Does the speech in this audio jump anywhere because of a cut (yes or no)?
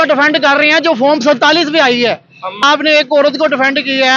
yes